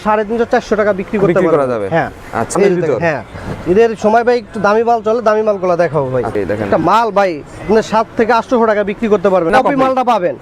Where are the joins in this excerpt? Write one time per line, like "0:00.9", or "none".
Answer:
0:02.5
0:06.4
0:09.5